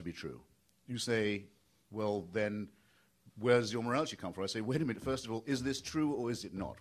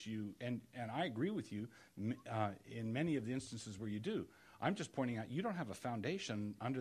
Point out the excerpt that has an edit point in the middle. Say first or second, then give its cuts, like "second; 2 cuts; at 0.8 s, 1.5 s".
first; 1 cut; at 3.8 s